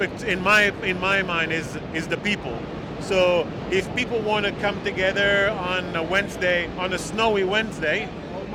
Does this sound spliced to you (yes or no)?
no